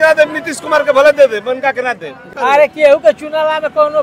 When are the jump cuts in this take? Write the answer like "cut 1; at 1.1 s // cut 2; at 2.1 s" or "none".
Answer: cut 1; at 2.3 s